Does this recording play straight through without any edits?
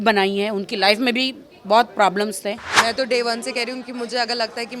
no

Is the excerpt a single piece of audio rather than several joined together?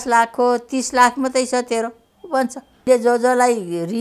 no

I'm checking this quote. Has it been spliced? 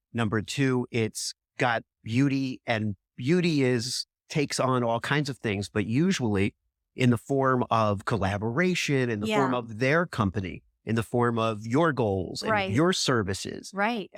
no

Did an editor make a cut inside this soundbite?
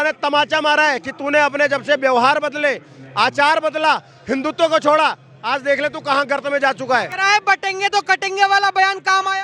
no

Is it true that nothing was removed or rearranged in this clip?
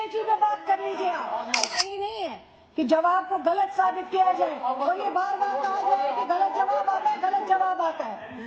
no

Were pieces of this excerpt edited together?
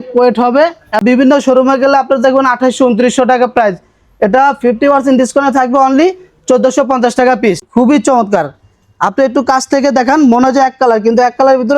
yes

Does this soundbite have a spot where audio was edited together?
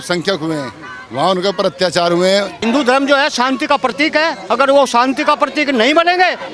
yes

